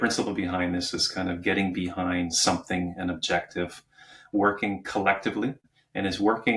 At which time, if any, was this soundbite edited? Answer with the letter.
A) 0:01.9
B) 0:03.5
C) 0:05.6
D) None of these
C